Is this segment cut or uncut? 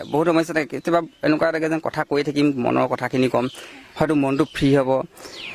uncut